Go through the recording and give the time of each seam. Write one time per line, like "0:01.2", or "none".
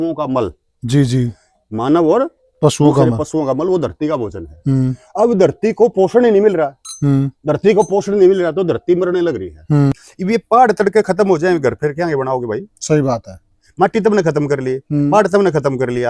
0:10.0